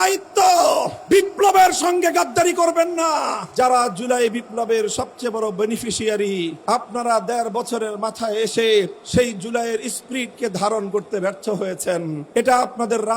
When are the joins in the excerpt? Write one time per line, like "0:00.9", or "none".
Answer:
0:01.0
0:03.4
0:06.6
0:09.0
0:12.2